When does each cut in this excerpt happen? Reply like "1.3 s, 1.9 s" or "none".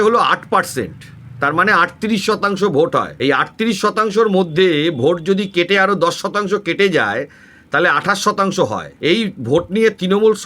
3.1 s, 8.9 s